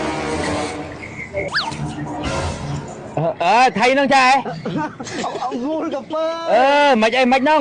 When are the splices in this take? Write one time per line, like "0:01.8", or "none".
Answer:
0:01.5